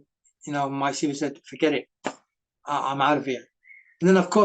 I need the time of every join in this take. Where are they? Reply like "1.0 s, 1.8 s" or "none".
none